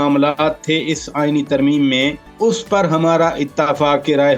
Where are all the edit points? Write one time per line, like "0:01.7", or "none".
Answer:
0:02.2

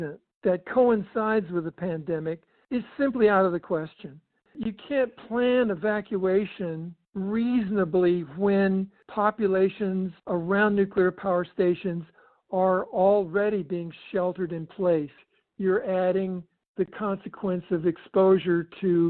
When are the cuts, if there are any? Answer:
0:04.5
0:09.0
0:10.2
0:15.2

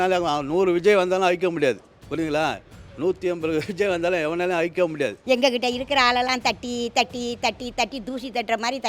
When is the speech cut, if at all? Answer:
0:05.2

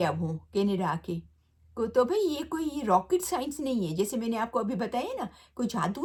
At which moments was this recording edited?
none

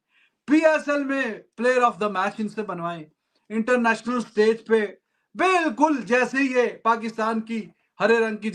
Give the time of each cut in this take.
none

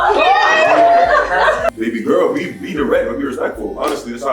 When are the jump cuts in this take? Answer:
0:01.7

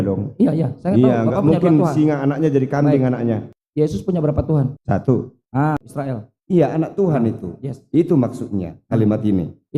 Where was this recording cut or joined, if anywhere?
0:03.6
0:05.9

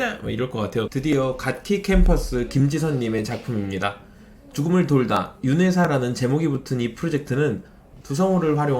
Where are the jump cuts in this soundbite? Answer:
0:00.9
0:07.9

